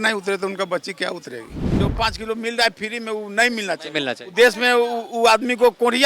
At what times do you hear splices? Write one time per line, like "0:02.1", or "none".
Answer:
0:01.6